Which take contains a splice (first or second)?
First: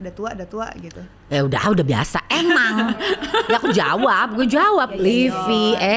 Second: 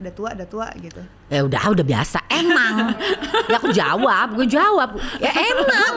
first